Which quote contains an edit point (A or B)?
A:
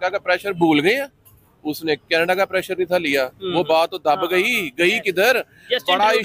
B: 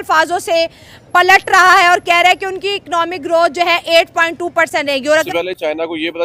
B